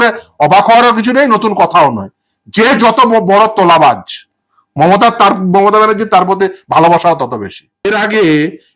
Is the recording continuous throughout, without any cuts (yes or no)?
no